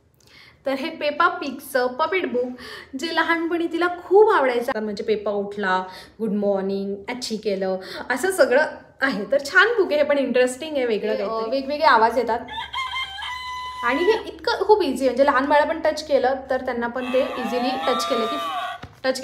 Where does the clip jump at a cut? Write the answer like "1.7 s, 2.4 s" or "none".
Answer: 4.7 s, 11.3 s